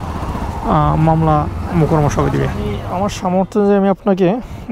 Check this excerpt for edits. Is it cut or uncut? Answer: cut